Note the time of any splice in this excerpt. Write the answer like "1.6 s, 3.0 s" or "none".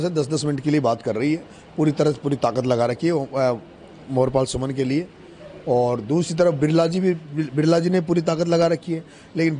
none